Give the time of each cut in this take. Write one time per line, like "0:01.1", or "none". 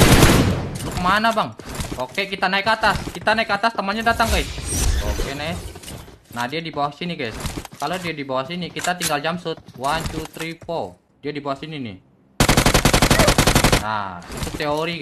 0:04.9
0:11.1